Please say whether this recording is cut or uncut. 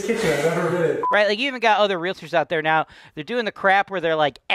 cut